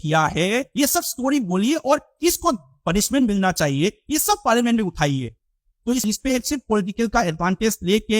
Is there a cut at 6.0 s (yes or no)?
yes